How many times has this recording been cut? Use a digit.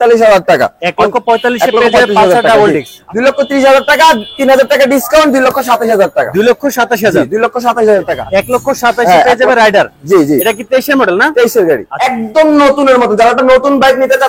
3